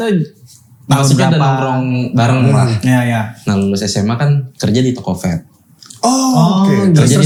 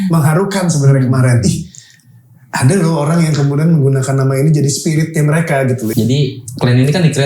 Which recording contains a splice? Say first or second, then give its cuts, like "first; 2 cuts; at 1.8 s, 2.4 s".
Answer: second; 1 cut; at 5.9 s